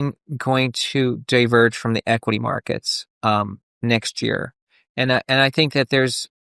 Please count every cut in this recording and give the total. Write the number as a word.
one